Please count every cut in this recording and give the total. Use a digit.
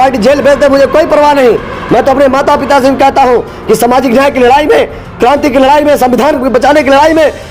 0